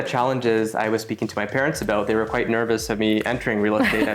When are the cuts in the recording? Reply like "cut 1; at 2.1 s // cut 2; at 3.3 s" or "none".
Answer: none